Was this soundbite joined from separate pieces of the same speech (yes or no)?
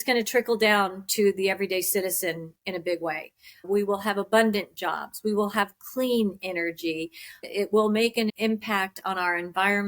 yes